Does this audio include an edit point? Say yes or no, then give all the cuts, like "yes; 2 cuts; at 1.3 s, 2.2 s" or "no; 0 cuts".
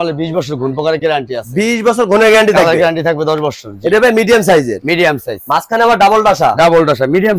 no; 0 cuts